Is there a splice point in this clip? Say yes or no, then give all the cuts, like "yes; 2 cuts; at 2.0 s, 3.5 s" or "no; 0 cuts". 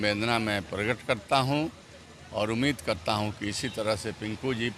no; 0 cuts